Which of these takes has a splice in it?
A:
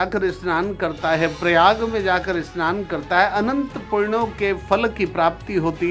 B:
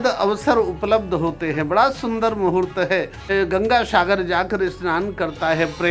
B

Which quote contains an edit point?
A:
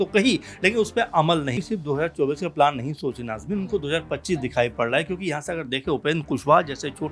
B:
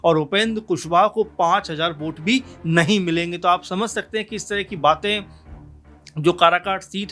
A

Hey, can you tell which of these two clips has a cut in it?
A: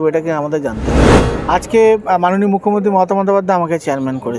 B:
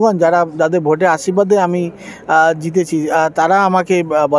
A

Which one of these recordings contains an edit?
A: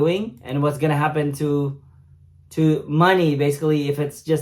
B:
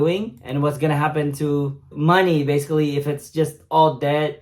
B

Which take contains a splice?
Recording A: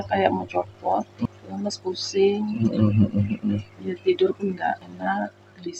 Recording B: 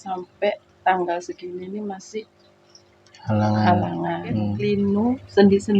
B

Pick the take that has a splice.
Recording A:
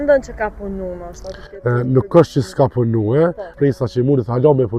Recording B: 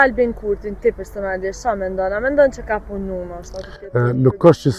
A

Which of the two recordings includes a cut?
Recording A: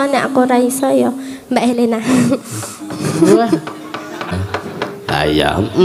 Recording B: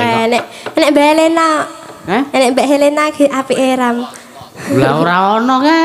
A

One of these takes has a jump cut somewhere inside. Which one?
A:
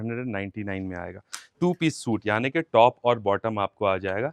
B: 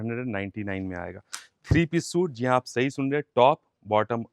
A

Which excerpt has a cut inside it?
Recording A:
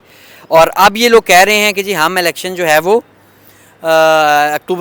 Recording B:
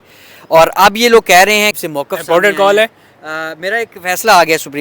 B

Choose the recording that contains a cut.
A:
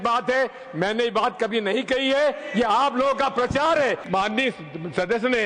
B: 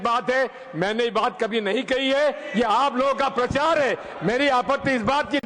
A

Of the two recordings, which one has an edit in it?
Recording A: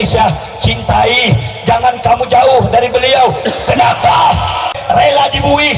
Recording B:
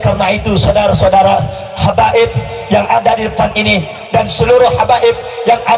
A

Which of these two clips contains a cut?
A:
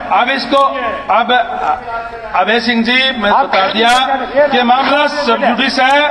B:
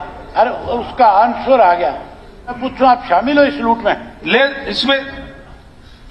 B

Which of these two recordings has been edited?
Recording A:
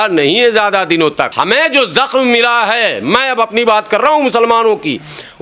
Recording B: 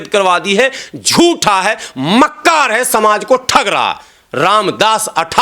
A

